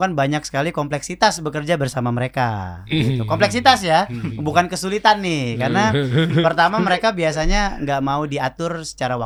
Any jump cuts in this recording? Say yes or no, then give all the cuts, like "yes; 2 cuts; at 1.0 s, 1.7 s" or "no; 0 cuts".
no; 0 cuts